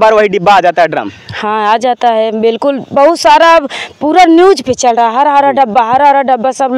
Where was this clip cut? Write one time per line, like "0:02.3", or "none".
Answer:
none